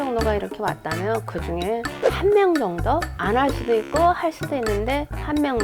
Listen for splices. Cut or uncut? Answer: uncut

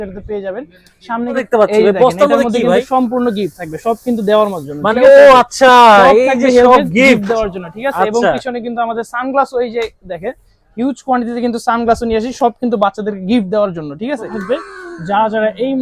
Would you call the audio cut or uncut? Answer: cut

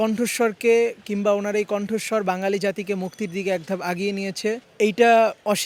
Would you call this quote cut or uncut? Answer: uncut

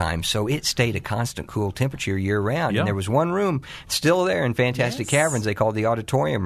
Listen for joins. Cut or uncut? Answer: uncut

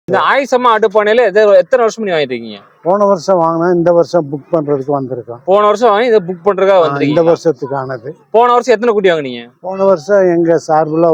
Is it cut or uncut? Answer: uncut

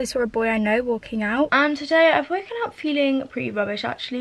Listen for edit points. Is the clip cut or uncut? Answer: cut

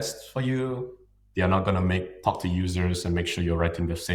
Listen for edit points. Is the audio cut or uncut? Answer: uncut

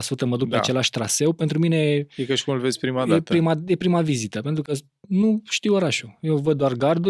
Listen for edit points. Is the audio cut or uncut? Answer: uncut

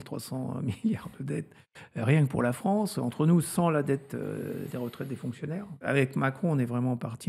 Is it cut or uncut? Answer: cut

